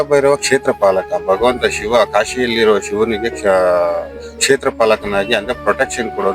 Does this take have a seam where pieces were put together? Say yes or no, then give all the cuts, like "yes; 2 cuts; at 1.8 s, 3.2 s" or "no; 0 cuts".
no; 0 cuts